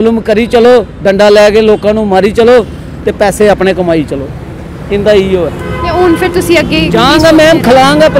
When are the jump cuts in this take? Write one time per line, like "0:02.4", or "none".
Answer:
none